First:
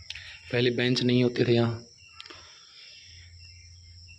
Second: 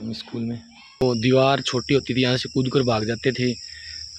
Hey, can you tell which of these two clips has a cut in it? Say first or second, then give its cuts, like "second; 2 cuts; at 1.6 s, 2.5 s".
second; 1 cut; at 1.0 s